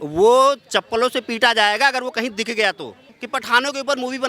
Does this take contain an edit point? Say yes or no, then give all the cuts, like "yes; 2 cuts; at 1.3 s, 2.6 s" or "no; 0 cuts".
yes; 1 cut; at 3.2 s